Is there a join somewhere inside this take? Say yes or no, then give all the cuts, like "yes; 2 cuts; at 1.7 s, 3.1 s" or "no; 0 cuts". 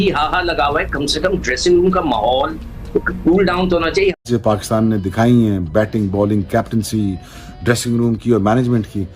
yes; 1 cut; at 4.2 s